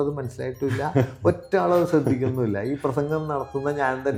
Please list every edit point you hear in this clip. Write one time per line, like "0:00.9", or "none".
none